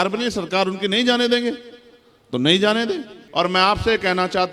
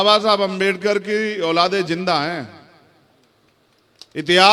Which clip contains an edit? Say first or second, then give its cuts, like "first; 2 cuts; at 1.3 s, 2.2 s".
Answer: first; 1 cut; at 3.2 s